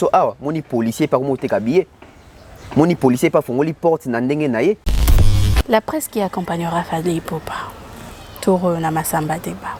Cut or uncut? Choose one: cut